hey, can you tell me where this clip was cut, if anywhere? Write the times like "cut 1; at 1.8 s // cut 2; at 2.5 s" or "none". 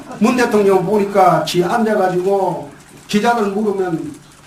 none